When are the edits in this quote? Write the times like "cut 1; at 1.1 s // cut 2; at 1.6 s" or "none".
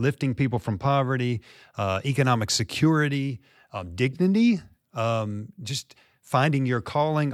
none